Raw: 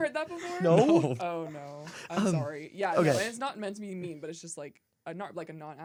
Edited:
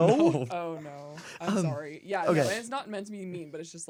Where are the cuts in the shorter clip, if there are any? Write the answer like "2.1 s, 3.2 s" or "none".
none